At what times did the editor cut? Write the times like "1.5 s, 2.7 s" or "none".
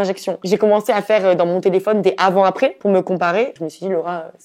3.6 s